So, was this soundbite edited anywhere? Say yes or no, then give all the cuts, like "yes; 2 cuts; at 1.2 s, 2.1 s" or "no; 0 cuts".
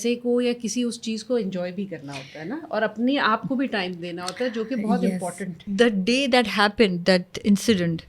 yes; 1 cut; at 5.6 s